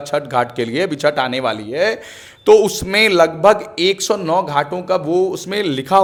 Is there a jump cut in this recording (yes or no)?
no